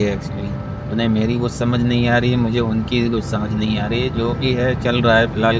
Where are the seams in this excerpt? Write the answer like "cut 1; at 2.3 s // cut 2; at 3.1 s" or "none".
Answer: none